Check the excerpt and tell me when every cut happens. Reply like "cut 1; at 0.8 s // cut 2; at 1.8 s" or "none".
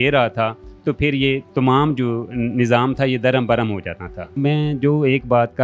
cut 1; at 4.4 s